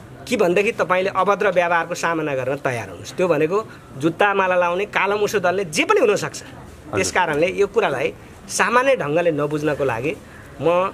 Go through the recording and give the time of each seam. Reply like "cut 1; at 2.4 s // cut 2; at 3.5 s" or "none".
none